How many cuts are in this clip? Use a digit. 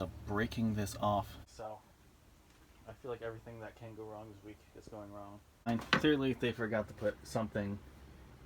2